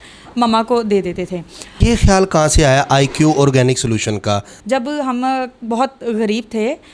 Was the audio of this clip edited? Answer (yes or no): yes